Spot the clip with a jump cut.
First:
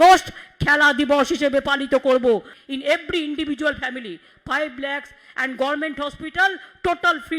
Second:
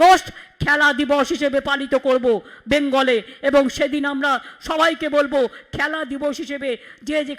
first; 1 cut; at 2.5 s

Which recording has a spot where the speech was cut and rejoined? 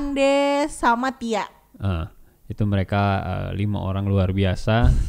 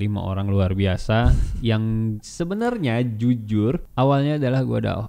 second; 1 cut; at 3.9 s

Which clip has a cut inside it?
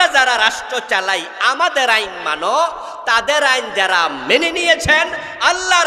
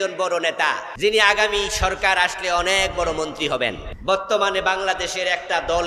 second; 2 cuts; at 0.9 s, 3.9 s

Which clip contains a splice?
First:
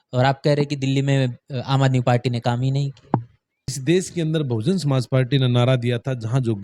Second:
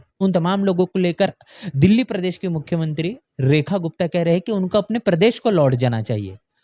first; 1 cut; at 3.8 s

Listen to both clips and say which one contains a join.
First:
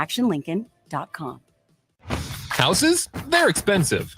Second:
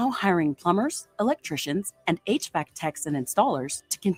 first; 1 cut; at 1.9 s

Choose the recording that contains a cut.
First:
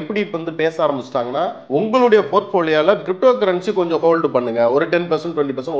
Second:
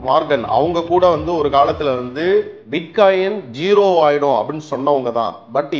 first; 1 cut; at 1.6 s

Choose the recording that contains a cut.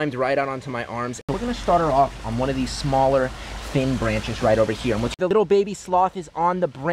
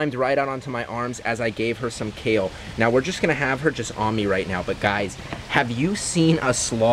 first; 2 cuts; at 1.2 s, 5.2 s

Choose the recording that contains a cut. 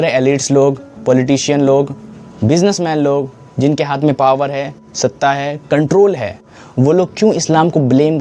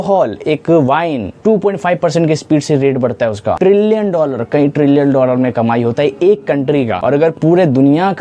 second; 3 cuts; at 1.3 s, 3.6 s, 7.0 s

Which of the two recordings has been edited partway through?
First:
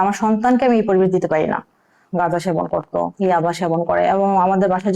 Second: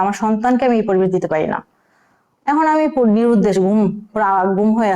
first; 1 cut; at 2.0 s

